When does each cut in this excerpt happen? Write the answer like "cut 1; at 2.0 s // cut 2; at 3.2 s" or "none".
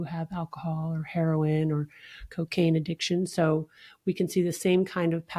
none